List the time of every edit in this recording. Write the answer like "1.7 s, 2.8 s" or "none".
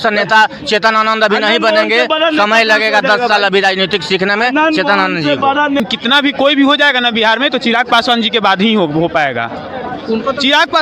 5.8 s